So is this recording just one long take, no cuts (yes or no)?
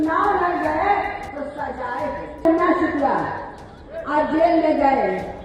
no